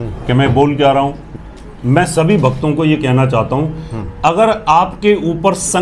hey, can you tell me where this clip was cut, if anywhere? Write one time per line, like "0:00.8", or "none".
0:01.3